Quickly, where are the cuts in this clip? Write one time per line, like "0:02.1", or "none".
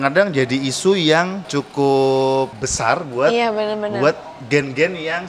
0:01.5
0:02.6